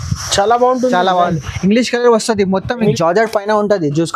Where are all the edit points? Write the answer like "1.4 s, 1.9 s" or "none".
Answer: 2.8 s